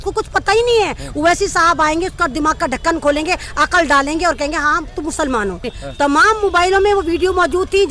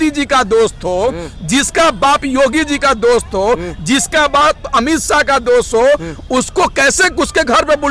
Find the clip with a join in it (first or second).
first